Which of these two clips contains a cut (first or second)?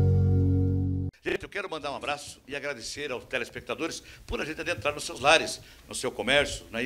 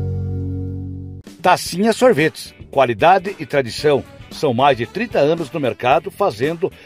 second